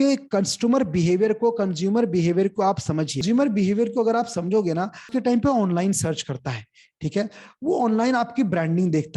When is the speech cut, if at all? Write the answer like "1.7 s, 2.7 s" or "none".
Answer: 3.2 s, 5.1 s